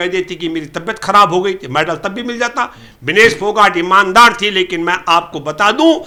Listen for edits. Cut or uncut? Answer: uncut